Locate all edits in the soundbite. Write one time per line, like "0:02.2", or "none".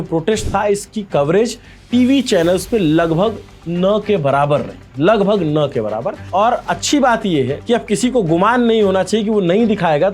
0:06.3
0:07.6